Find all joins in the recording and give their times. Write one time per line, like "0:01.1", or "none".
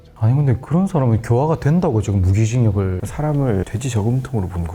0:03.0